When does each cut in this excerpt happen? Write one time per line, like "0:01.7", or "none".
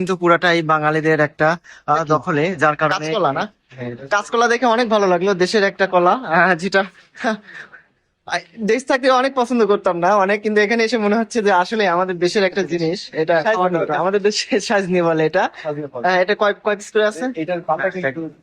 0:02.9
0:14.0